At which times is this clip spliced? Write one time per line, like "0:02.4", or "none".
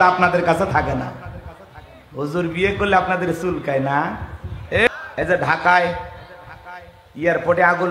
0:04.9